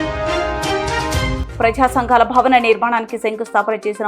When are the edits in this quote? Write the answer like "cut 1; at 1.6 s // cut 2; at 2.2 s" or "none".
cut 1; at 1.4 s

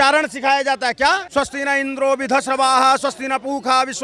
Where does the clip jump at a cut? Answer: cut 1; at 1.2 s

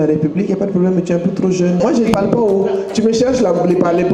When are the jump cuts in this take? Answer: cut 1; at 1.8 s

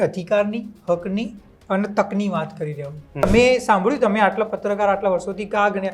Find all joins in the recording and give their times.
cut 1; at 3.2 s

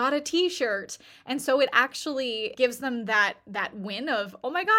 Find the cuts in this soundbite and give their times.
cut 1; at 2.5 s

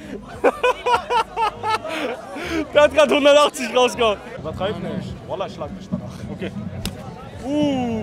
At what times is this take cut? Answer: cut 1; at 4.2 s

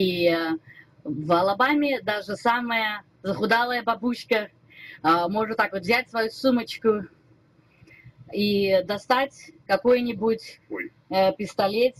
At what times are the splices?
none

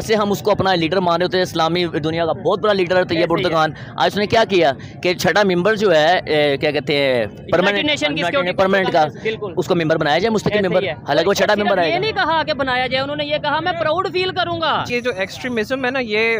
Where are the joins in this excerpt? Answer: cut 1; at 14.9 s

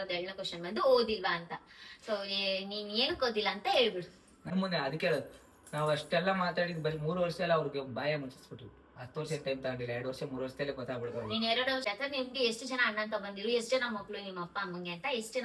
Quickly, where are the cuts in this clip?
cut 1; at 4.5 s // cut 2; at 11.9 s

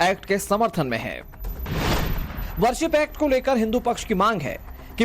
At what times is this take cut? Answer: cut 1; at 2.4 s

